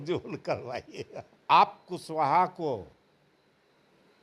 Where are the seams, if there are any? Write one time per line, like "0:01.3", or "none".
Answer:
0:01.5